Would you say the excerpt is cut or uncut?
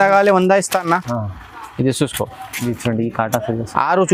cut